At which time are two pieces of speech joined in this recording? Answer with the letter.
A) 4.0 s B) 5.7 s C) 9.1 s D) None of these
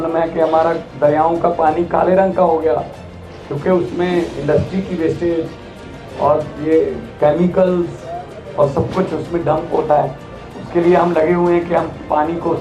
D